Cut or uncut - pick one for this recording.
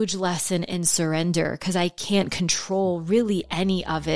uncut